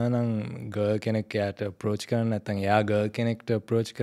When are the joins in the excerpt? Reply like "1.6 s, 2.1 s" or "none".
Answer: none